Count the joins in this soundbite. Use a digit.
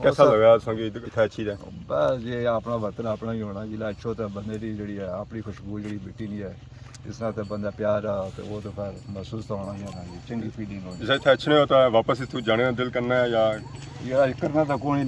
1